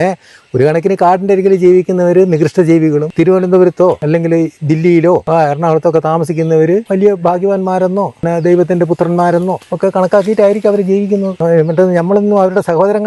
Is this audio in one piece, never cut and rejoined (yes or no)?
no